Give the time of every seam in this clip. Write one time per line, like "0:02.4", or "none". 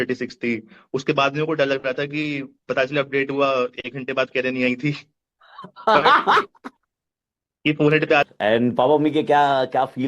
0:08.3